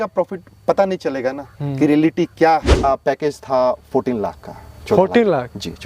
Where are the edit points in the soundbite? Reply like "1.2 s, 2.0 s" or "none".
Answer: 2.9 s